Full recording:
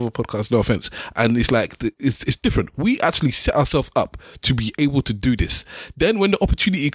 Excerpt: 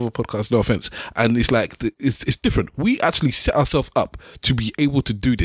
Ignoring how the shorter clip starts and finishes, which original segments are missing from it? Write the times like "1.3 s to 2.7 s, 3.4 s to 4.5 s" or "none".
none